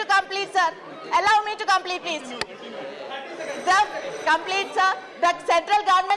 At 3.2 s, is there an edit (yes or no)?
no